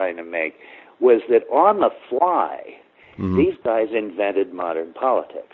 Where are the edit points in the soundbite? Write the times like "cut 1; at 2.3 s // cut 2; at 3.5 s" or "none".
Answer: none